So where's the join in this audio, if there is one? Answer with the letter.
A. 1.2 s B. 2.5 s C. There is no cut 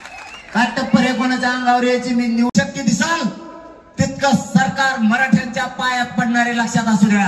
B